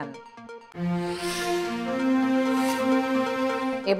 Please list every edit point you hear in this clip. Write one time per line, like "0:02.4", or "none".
none